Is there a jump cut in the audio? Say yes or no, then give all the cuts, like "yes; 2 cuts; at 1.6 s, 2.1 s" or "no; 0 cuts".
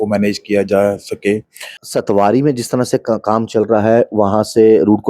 yes; 1 cut; at 1.8 s